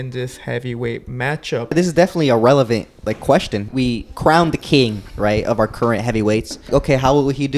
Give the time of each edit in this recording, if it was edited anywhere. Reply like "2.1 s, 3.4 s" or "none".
1.7 s, 3.7 s, 6.7 s